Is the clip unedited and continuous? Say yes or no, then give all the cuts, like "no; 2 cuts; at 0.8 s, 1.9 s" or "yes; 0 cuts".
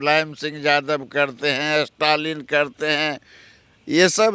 yes; 0 cuts